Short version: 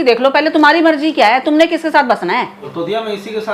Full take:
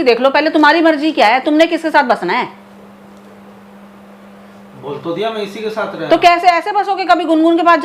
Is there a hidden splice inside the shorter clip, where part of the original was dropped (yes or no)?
yes